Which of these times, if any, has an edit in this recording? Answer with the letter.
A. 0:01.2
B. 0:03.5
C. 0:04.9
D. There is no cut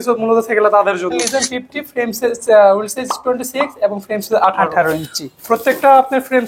A